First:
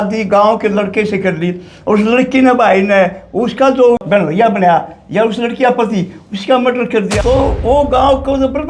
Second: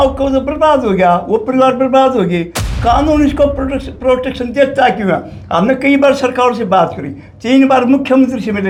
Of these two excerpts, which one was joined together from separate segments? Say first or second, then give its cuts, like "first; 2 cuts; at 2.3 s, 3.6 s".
first; 2 cuts; at 4.0 s, 7.1 s